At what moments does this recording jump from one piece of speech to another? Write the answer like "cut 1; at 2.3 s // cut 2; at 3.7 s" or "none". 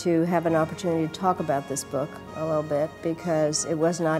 none